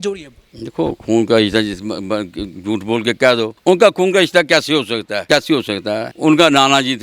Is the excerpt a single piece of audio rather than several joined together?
no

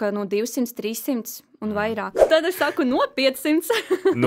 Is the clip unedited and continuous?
no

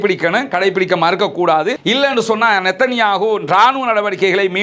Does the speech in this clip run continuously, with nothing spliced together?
yes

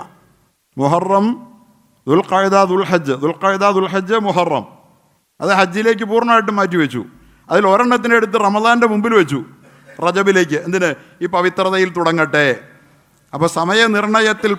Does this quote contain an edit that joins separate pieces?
no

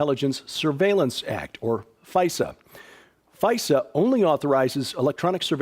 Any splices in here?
no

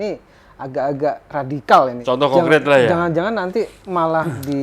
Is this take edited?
yes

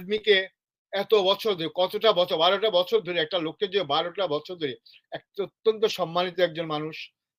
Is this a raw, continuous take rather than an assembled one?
yes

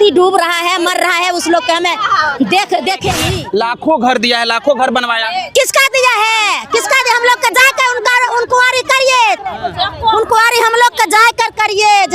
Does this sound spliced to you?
yes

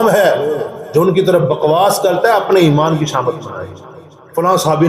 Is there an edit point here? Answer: no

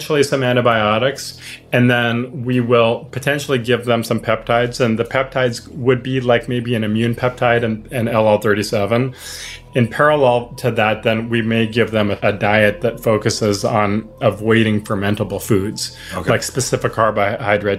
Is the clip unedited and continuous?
no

